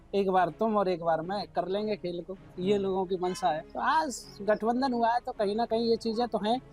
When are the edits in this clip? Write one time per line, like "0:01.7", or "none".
0:03.7